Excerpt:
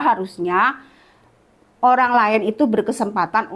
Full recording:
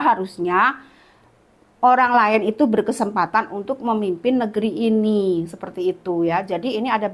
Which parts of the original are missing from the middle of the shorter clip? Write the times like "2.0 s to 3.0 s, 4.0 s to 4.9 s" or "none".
none